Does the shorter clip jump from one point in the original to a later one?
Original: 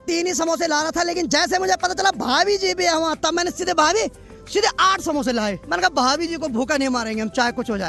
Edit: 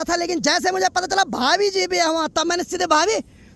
no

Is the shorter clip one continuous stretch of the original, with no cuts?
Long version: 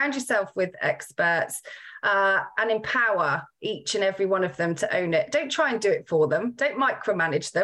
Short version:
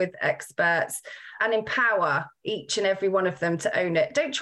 no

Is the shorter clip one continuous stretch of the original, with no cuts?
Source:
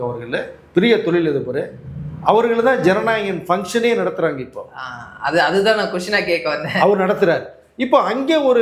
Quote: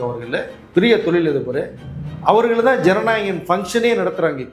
yes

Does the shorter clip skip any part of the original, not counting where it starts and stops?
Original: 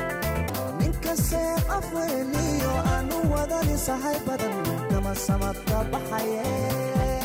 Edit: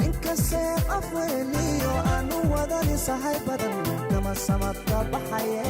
no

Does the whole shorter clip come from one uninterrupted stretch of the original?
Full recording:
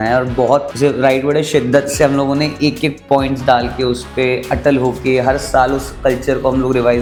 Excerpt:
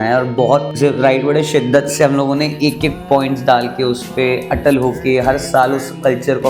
yes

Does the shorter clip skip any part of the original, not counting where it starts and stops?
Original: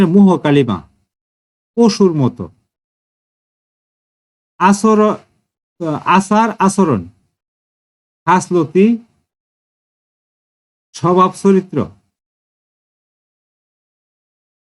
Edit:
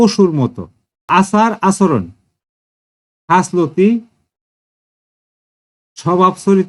yes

